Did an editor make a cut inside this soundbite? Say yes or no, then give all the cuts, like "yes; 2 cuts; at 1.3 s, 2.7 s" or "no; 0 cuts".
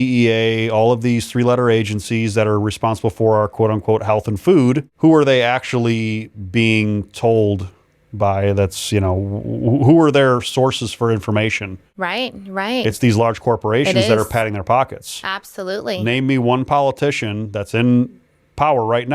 yes; 1 cut; at 4.9 s